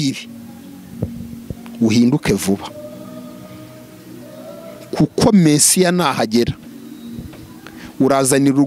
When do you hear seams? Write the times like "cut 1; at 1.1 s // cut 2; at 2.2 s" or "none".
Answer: none